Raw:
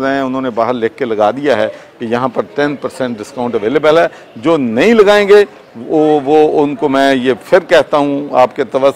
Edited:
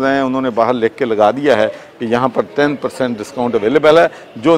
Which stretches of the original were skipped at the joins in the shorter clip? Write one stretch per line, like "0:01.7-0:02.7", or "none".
none